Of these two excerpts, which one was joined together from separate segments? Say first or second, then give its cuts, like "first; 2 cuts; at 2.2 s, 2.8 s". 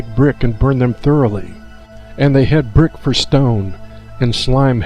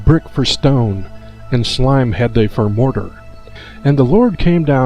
second; 1 cut; at 3.2 s